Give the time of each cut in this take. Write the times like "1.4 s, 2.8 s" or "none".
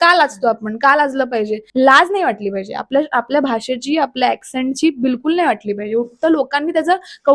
1.6 s